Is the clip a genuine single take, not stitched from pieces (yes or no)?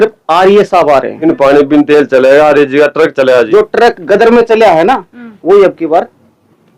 no